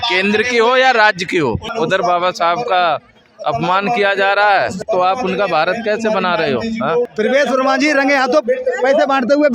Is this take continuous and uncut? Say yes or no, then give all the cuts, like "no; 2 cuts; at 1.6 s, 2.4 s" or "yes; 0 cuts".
no; 3 cuts; at 1.7 s, 4.8 s, 7.1 s